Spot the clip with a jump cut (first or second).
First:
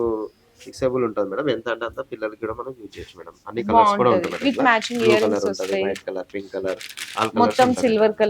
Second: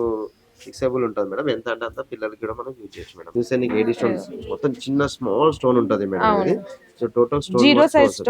second